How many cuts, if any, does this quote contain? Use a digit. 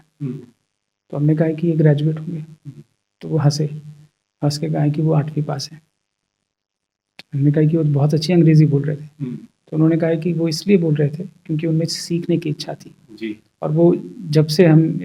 0